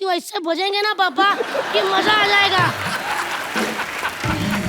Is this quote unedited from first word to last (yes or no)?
yes